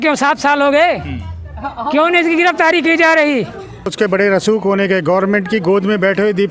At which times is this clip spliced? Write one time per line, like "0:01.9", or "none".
0:03.9

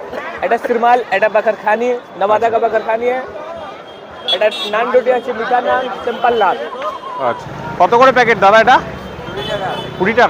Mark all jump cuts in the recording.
0:07.5

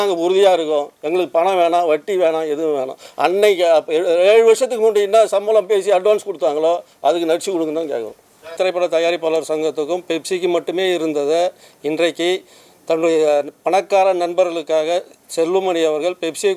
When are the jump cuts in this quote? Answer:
0:08.5

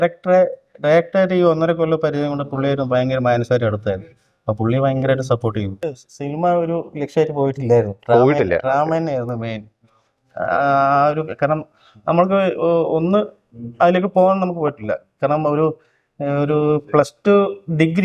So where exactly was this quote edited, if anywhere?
0:05.9

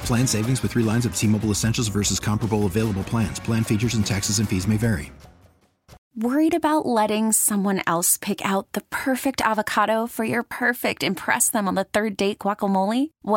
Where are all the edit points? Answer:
0:06.0

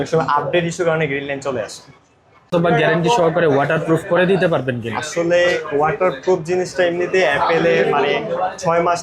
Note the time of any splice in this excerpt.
0:02.5

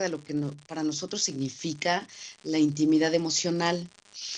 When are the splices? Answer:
none

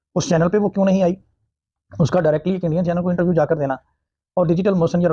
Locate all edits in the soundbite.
none

